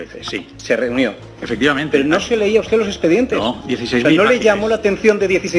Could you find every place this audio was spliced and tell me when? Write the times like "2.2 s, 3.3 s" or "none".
1.3 s